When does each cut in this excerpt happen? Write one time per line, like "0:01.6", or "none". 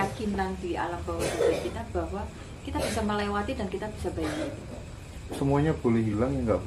none